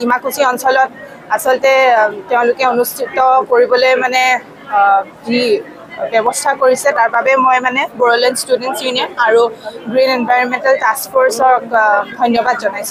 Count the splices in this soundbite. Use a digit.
0